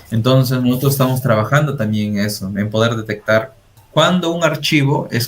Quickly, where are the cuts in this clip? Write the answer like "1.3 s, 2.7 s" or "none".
3.8 s